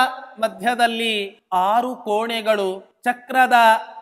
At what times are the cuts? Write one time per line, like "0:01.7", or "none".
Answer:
0:01.3
0:02.9